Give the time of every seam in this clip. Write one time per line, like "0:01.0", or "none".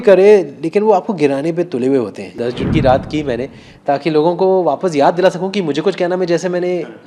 0:02.4